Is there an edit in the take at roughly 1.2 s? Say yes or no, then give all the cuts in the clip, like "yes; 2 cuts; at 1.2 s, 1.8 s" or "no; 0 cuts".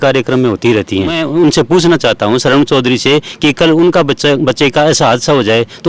yes; 1 cut; at 1.2 s